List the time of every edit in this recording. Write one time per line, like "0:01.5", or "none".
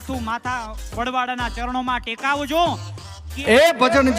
0:03.3